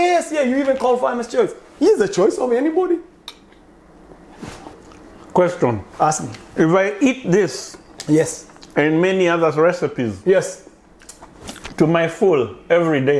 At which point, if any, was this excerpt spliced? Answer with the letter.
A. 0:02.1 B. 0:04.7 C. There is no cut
B